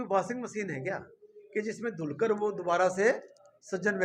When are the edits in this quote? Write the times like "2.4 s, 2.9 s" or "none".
none